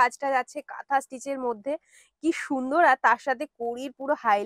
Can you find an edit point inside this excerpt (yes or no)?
no